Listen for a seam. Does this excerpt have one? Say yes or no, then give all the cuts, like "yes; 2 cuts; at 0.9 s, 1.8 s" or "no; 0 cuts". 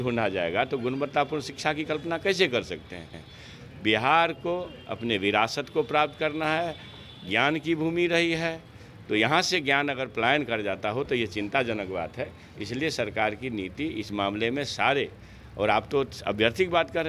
no; 0 cuts